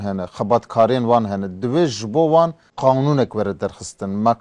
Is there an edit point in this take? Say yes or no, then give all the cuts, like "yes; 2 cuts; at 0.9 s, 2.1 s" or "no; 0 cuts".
yes; 1 cut; at 2.6 s